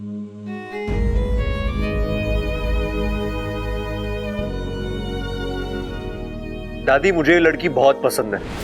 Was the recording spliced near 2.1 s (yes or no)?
no